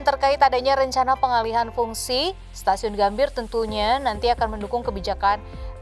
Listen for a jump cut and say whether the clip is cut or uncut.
uncut